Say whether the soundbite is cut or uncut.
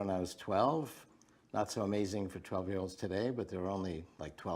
cut